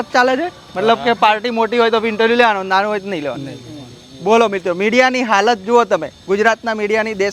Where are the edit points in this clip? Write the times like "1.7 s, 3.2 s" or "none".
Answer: none